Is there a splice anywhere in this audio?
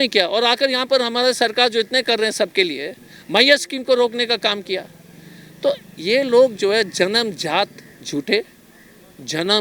no; 0 cuts

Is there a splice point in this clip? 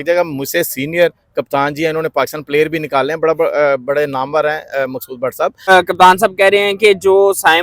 yes; 1 cut; at 5.7 s

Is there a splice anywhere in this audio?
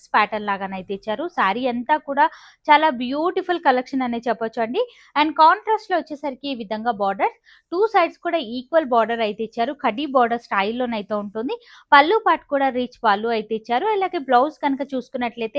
no; 0 cuts

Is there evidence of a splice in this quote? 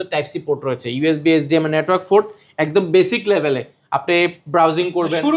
no; 0 cuts

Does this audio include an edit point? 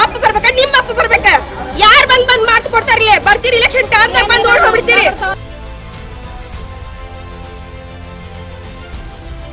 no; 0 cuts

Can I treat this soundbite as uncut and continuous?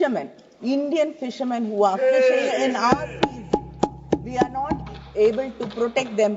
yes; 0 cuts

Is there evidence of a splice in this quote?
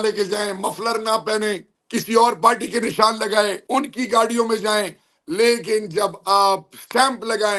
no; 0 cuts

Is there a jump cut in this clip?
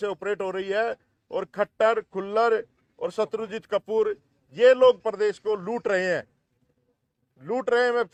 no; 0 cuts

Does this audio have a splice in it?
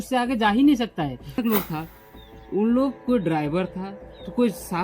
yes; 1 cut; at 1.3 s

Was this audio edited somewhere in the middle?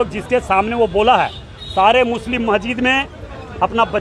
no; 0 cuts

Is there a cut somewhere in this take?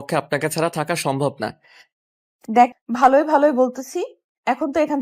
yes; 1 cut; at 2.8 s

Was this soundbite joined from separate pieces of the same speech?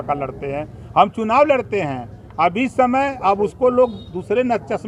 no; 0 cuts

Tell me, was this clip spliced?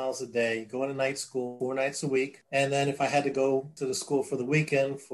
yes; 3 cuts; at 1.5 s, 2.4 s, 3.7 s

